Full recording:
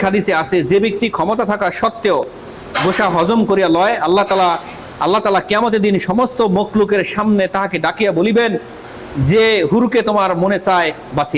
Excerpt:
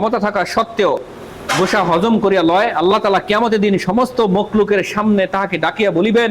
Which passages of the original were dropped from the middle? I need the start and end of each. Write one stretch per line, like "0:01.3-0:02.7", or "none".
0:04.2-0:05.1